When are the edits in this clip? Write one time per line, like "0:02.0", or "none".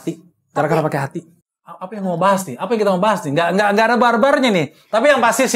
0:01.3